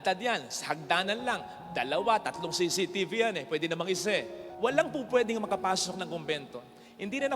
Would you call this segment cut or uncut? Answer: cut